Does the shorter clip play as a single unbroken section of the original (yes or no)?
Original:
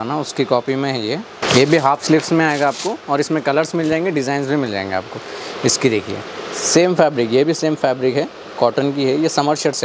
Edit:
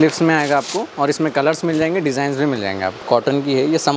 no